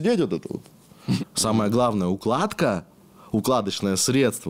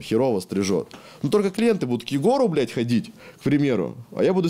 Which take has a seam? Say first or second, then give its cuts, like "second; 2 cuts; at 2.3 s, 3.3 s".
first; 1 cut; at 1.2 s